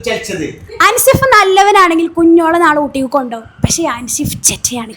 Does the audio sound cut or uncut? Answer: uncut